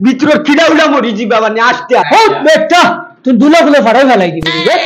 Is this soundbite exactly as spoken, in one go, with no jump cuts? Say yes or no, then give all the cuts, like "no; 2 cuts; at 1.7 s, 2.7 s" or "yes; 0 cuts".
no; 1 cut; at 2.1 s